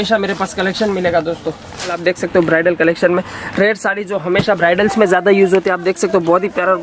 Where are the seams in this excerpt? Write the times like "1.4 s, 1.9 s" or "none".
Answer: 2.0 s